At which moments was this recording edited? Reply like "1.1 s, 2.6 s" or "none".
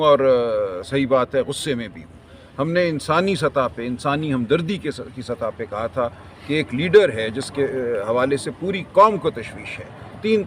none